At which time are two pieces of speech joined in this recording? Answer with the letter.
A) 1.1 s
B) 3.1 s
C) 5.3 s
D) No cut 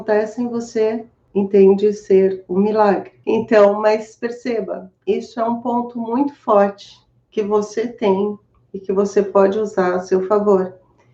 B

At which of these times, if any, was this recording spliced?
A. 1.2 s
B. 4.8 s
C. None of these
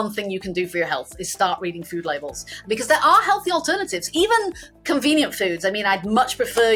C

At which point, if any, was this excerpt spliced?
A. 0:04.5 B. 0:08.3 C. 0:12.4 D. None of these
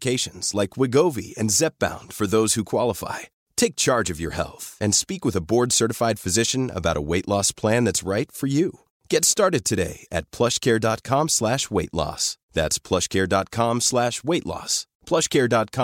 D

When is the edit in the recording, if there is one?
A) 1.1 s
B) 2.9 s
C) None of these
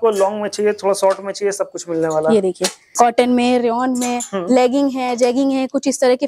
B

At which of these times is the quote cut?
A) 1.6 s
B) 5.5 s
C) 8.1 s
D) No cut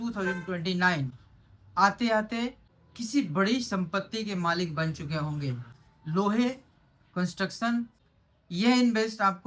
D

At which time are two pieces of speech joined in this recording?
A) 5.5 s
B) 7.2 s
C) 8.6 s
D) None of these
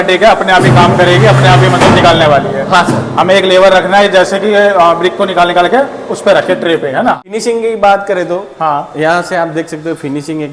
B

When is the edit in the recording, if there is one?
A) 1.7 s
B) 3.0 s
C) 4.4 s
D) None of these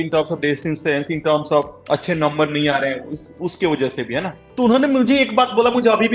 C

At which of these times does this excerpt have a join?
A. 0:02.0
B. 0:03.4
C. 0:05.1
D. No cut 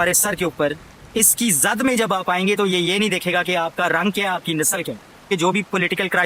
C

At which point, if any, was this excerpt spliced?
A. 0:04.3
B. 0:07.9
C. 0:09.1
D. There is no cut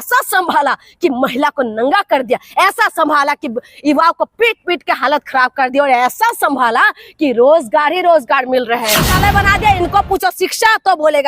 C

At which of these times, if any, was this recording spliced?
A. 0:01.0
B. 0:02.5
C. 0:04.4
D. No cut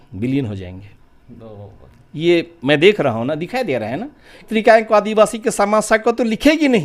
C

